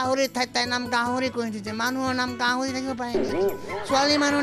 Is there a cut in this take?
no; 0 cuts

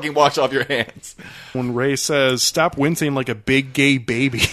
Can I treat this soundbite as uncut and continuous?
no; 1 cut; at 1.5 s

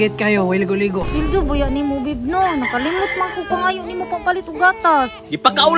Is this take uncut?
no; 1 cut; at 1.1 s

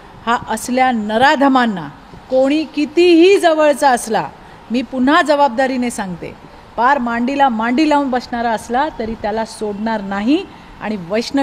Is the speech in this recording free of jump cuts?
yes; 0 cuts

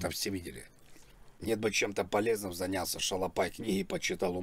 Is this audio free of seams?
no; 1 cut; at 1.3 s

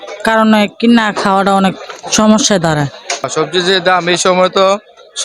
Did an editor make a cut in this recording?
yes; 1 cut; at 3.3 s

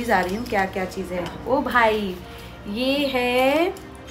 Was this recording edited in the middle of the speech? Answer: no; 0 cuts

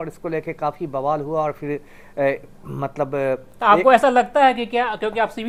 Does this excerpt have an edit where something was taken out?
no; 0 cuts

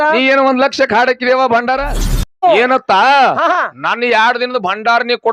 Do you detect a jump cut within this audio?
yes; 1 cut; at 2.4 s

